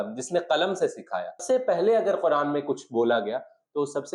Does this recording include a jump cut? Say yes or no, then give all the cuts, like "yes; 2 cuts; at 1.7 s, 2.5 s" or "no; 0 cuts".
yes; 1 cut; at 1.4 s